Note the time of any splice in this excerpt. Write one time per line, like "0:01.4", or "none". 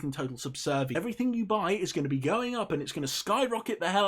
0:00.9